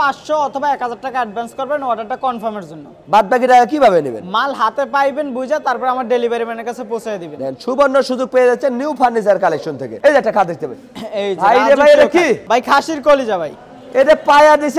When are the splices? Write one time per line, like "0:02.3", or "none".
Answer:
none

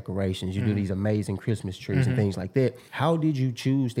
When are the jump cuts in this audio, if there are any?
0:02.9

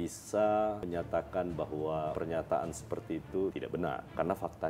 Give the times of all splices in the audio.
0:00.8
0:02.1
0:03.6

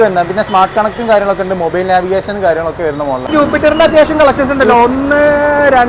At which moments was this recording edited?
0:03.3

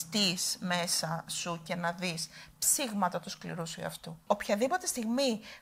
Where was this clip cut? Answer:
0:04.2

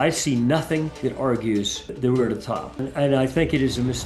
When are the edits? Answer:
0:00.9
0:01.9
0:02.8

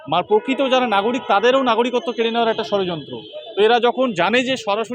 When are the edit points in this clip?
none

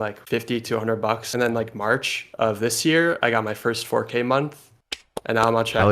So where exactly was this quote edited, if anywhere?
0:01.3

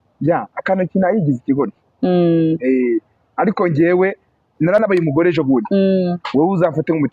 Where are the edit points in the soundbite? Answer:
0:04.8

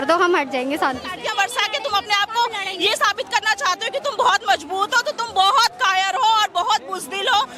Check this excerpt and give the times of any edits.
0:01.1

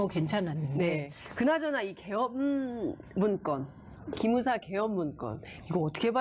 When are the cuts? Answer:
0:01.1

